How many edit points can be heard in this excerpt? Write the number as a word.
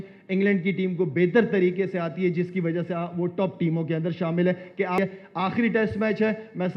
one